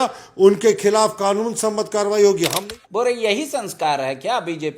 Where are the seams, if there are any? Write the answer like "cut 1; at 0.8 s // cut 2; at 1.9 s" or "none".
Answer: cut 1; at 2.6 s